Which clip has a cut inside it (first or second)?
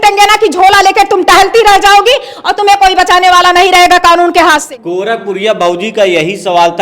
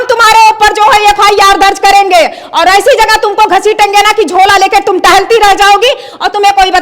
first